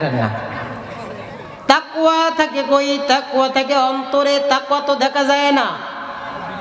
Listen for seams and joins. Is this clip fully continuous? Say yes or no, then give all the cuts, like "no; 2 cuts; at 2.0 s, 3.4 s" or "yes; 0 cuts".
no; 1 cut; at 1.5 s